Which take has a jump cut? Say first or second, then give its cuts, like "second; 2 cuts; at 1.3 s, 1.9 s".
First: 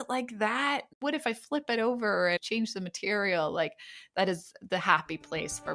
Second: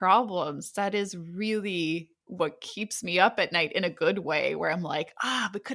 first; 3 cuts; at 0.9 s, 2.4 s, 4.5 s